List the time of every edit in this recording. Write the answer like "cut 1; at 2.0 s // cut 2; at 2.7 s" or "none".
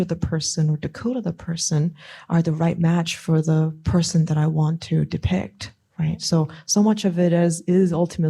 none